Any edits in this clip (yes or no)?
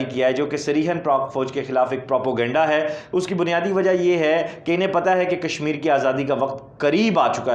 no